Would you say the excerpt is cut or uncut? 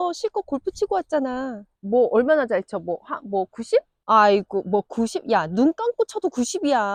uncut